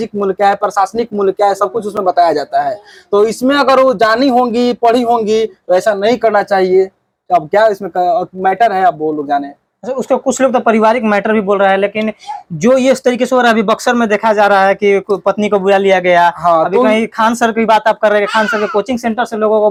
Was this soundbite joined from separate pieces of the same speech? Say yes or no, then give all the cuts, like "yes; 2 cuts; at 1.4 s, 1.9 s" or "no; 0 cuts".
no; 0 cuts